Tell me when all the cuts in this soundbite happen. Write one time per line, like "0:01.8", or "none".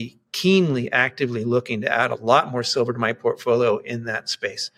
none